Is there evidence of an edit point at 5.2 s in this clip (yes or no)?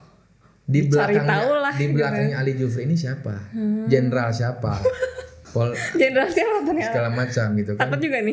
no